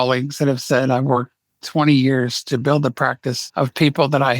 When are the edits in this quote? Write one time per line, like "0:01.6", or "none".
0:03.4